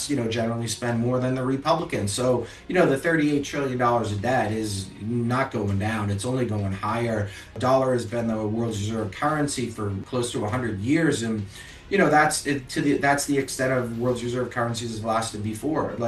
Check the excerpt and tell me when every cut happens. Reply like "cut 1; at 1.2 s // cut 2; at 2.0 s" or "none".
cut 1; at 7.6 s // cut 2; at 10.0 s